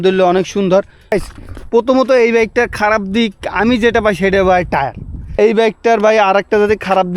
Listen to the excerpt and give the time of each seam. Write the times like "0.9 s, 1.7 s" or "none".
1.1 s, 5.3 s